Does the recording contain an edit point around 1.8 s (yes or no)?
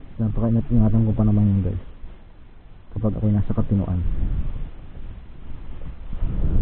no